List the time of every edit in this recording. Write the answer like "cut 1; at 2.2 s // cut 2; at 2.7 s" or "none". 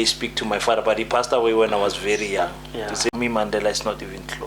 cut 1; at 3.1 s